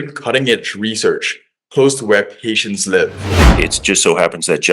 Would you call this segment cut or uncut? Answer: cut